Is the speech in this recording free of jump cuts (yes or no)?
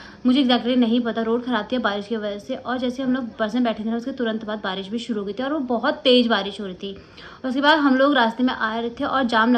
yes